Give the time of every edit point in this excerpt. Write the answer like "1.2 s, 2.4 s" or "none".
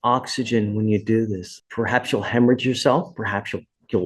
1.5 s